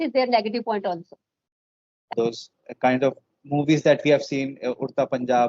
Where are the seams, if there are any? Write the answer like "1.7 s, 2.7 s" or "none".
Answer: 2.1 s